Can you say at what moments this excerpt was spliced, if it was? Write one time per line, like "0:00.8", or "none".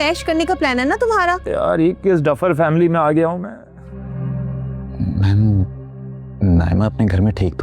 0:03.9